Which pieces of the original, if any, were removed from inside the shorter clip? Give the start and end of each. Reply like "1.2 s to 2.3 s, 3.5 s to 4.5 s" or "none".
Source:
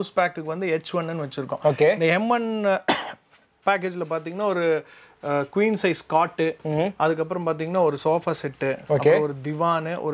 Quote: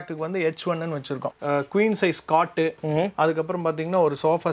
1.5 s to 5.1 s

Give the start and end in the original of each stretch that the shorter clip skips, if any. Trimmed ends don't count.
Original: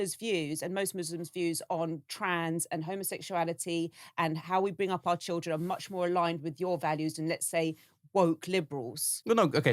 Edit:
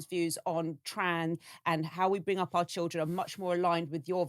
2.6 s to 3.9 s

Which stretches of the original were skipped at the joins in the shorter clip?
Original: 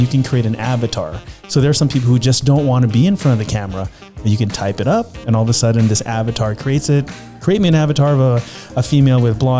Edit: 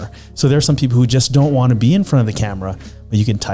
none

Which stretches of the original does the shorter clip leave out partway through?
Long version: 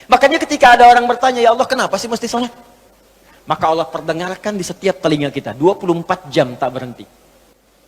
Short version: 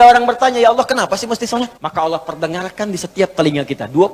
2.6 s to 3.5 s

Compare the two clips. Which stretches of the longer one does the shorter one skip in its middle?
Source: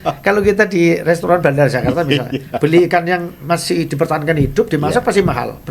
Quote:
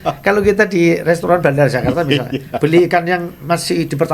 none

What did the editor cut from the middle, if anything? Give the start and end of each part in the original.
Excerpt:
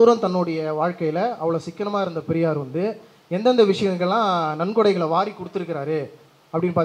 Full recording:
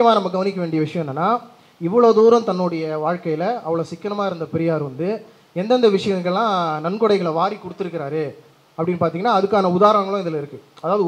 none

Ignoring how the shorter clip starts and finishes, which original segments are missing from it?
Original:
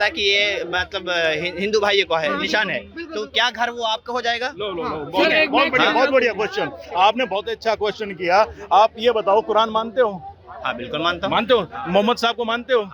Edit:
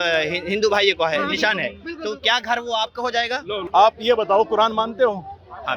4.7 s to 8.6 s

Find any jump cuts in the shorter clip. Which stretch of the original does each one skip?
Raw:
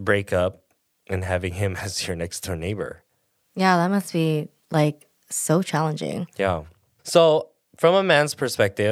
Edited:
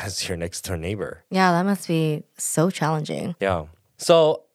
3.0 s to 3.4 s, 4.6 s to 5.2 s, 6.4 s to 6.5 s

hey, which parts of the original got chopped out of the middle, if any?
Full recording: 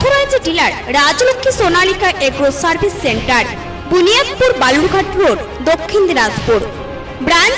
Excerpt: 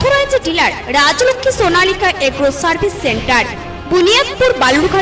none

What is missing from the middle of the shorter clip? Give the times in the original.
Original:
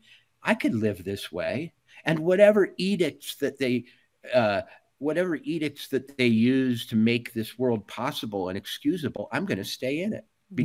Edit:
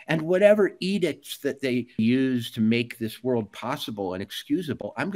4.0 s to 6.3 s

